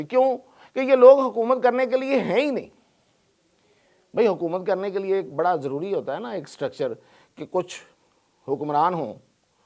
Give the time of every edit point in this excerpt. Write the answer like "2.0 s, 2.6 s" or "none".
none